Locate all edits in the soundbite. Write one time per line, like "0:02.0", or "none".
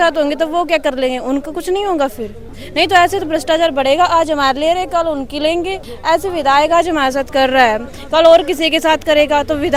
none